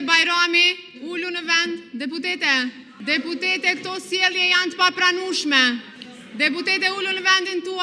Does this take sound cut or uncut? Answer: cut